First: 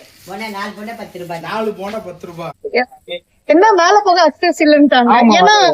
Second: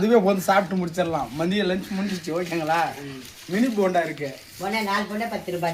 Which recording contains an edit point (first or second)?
first